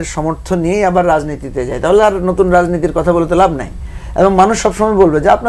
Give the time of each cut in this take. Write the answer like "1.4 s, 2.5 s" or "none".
none

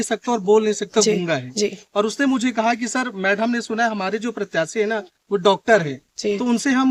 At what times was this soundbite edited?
none

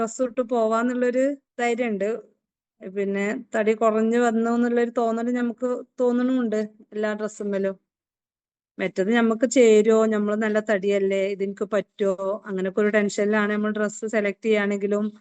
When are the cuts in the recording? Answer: 1.5 s

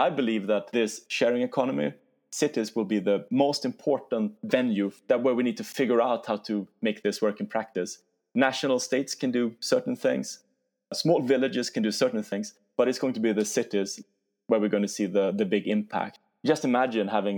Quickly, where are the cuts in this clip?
none

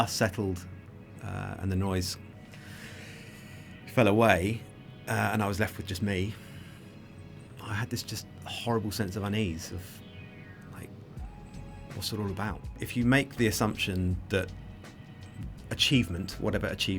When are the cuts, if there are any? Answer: 12.9 s

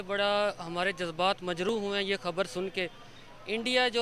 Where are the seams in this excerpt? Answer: none

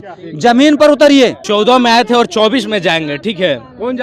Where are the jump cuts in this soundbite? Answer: none

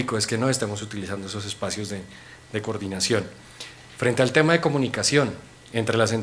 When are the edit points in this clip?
5.0 s

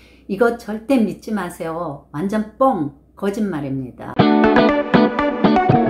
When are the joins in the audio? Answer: 4.0 s

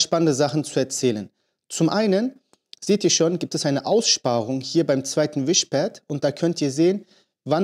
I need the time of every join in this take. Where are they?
none

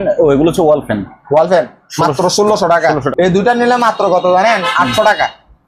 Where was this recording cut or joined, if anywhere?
3.1 s

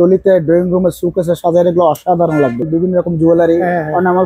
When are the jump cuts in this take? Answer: 2.7 s

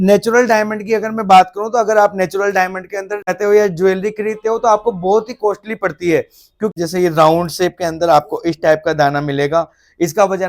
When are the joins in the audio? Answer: 3.4 s, 6.7 s

